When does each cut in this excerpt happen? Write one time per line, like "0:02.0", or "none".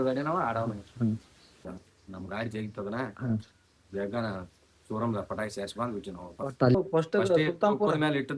0:01.7
0:06.8